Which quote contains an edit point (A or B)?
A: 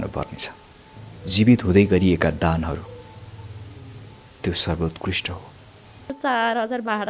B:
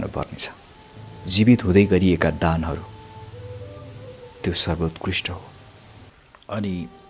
A